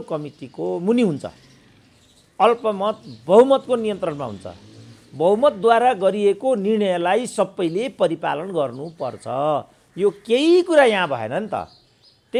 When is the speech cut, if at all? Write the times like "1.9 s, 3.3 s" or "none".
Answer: none